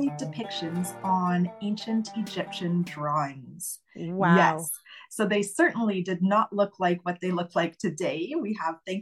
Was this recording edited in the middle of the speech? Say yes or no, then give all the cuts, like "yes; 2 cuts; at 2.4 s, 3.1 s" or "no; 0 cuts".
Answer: no; 0 cuts